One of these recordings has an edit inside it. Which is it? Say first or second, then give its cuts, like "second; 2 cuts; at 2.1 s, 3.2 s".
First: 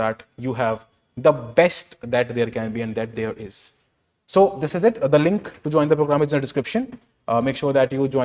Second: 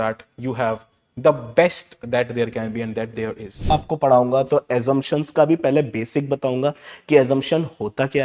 second; 1 cut; at 3.7 s